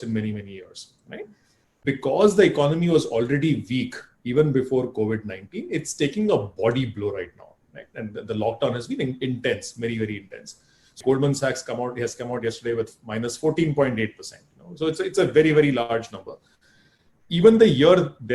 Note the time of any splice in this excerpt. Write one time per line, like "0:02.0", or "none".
0:01.7
0:11.0